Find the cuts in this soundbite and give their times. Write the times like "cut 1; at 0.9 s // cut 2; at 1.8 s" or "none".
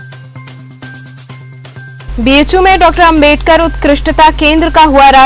cut 1; at 2.1 s